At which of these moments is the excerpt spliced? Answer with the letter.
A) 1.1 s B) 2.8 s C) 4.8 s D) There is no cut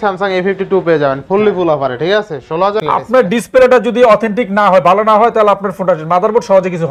B